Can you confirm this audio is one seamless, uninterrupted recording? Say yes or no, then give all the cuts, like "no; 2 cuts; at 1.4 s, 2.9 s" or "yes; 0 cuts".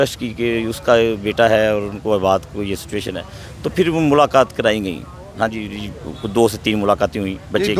yes; 0 cuts